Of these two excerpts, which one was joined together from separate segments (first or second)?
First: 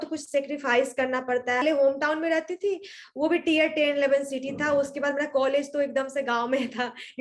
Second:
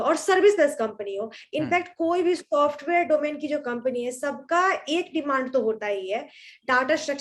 first